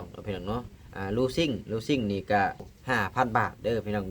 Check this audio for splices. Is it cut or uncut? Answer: cut